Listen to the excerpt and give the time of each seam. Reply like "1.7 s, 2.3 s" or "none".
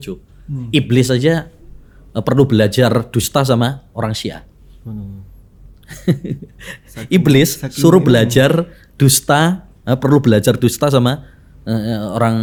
none